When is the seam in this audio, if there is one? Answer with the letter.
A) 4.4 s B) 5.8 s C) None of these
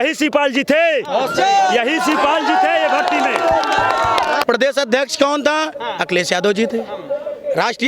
A